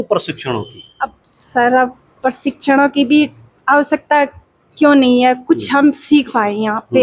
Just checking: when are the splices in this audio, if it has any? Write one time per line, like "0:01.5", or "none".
none